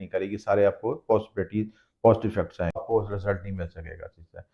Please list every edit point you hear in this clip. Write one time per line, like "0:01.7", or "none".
0:02.8